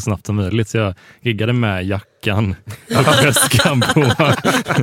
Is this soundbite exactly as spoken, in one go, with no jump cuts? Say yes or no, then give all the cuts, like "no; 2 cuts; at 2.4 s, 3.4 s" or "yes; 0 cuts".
yes; 0 cuts